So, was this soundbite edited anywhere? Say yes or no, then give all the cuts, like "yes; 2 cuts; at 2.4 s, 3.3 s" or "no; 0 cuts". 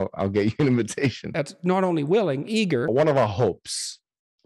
yes; 2 cuts; at 1.3 s, 2.9 s